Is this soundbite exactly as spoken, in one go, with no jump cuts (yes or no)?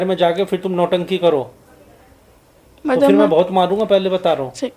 yes